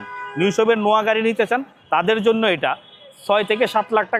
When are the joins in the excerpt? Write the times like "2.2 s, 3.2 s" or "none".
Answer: none